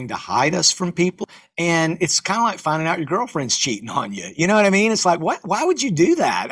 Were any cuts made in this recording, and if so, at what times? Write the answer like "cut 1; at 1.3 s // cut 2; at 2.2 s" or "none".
cut 1; at 1.2 s